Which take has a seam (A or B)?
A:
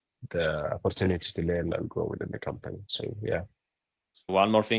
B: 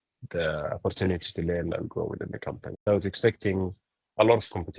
B